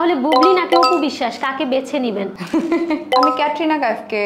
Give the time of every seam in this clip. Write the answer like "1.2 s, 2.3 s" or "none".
3.0 s